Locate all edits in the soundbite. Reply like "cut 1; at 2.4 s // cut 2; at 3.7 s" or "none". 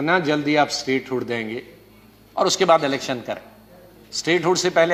none